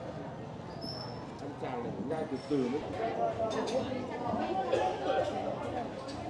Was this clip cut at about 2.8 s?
yes; 1 cut; at 2.8 s

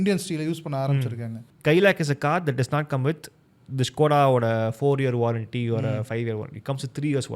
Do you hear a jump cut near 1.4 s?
yes; 1 cut; at 1.4 s

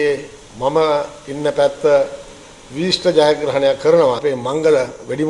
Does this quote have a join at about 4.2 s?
yes; 1 cut; at 4.2 s

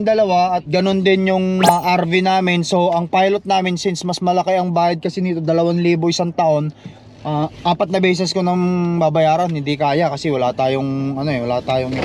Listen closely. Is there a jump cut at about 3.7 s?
no; 1 cut; at 1.6 s

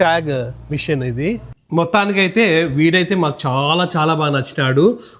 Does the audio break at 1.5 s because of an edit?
yes; 1 cut; at 1.5 s

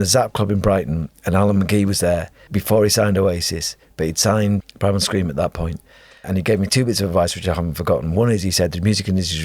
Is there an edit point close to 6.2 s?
yes; 3 cuts; at 2.4 s, 4.6 s, 6.2 s

